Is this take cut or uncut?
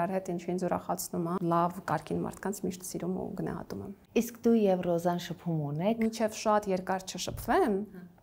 cut